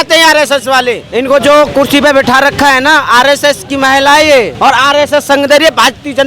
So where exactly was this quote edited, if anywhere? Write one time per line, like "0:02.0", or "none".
0:01.0
0:04.5